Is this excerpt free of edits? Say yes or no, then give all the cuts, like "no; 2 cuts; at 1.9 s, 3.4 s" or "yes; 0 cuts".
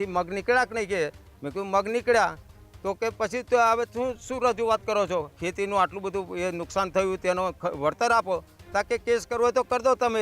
no; 1 cut; at 5.4 s